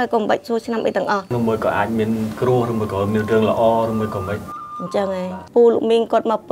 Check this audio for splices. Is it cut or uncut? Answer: cut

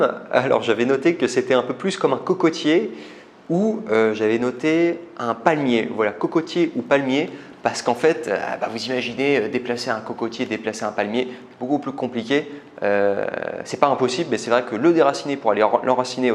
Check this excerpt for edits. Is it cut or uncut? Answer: uncut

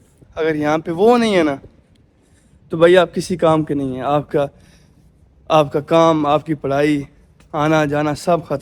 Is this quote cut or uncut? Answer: uncut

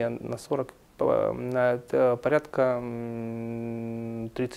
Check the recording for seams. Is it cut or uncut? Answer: uncut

